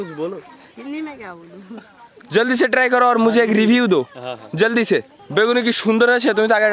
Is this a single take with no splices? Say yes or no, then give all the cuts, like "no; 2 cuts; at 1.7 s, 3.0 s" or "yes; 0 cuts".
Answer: no; 1 cut; at 5.2 s